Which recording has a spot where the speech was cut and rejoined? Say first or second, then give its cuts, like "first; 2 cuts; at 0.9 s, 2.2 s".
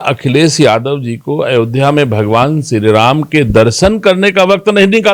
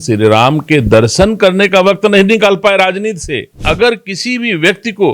second; 1 cut; at 3.6 s